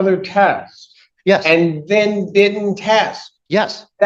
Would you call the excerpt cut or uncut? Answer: uncut